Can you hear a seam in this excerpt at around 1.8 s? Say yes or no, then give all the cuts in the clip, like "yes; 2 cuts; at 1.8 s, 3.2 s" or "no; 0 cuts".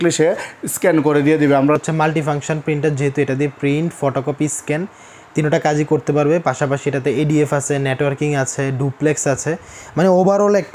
yes; 1 cut; at 1.8 s